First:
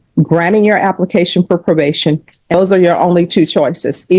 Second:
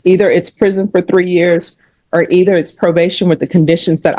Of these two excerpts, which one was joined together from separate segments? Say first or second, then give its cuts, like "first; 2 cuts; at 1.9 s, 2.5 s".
first; 1 cut; at 2.5 s